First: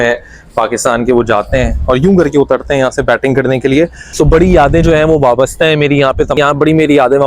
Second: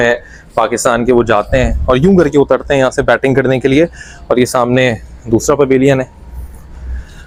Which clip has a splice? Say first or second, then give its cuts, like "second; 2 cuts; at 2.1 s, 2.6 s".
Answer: first; 2 cuts; at 4.0 s, 6.4 s